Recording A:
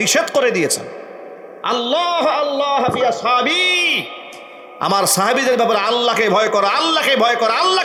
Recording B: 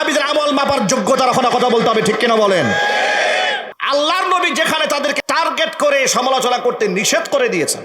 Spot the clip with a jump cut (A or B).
B